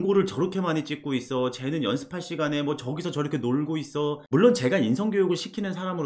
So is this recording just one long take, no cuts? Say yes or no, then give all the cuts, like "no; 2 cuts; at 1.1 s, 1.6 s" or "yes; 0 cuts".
no; 1 cut; at 4.2 s